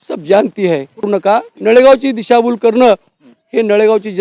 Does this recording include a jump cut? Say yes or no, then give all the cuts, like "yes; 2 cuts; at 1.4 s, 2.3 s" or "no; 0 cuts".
yes; 1 cut; at 1.1 s